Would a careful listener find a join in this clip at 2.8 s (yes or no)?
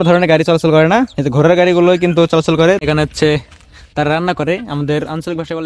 yes